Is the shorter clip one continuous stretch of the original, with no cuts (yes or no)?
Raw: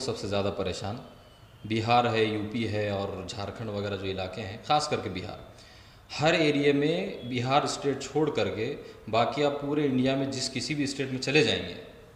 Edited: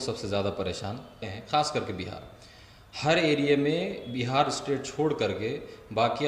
no